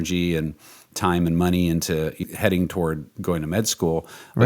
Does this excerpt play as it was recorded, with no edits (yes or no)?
no